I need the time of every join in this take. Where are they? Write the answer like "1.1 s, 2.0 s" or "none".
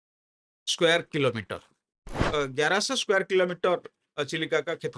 2.2 s